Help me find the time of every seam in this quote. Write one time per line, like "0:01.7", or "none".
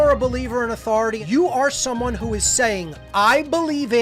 0:01.2